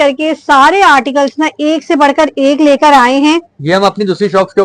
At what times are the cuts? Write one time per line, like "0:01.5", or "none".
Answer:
none